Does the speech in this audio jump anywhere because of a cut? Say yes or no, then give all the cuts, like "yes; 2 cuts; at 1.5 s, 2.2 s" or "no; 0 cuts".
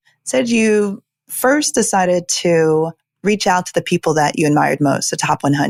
no; 0 cuts